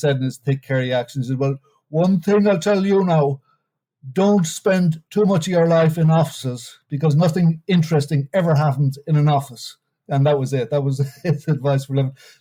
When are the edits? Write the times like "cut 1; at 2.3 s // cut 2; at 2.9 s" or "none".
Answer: none